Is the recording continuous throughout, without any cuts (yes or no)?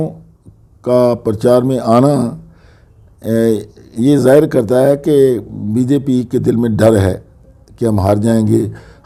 yes